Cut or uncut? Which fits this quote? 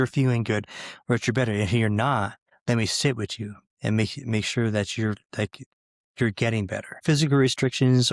cut